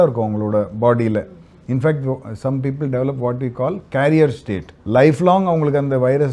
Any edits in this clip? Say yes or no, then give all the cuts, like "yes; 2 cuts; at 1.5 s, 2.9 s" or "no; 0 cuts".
no; 0 cuts